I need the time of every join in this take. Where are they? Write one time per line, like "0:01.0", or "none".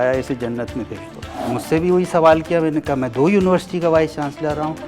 0:01.5